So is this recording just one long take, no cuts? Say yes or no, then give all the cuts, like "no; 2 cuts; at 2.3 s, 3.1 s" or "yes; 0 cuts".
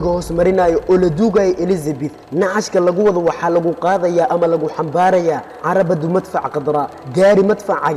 yes; 0 cuts